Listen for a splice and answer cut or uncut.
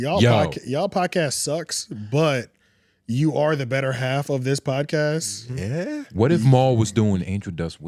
uncut